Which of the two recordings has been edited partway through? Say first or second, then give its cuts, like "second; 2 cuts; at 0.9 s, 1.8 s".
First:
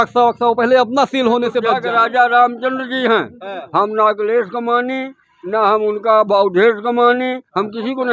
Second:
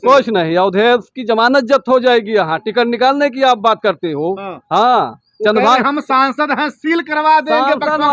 first; 1 cut; at 1.7 s